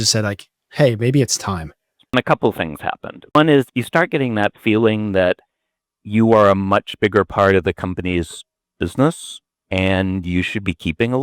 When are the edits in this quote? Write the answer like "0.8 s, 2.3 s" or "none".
2.1 s, 3.4 s

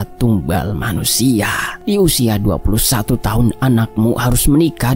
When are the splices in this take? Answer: 1.7 s

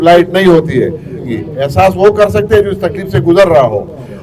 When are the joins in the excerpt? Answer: 1.3 s

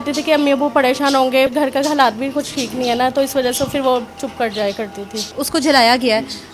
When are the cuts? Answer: 1.5 s, 5.4 s

